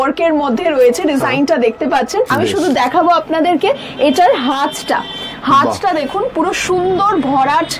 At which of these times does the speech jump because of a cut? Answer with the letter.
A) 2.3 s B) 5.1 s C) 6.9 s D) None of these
A